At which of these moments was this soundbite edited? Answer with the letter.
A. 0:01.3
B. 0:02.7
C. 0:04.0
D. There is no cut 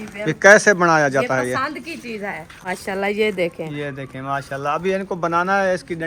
B